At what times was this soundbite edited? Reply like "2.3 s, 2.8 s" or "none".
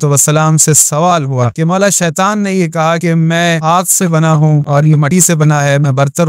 1.5 s, 3.3 s, 4.9 s